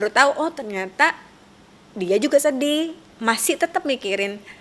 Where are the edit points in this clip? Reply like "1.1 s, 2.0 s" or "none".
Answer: 3.1 s